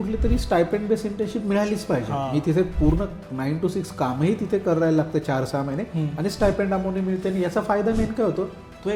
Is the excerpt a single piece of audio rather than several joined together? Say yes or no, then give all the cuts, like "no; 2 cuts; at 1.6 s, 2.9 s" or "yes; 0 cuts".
yes; 0 cuts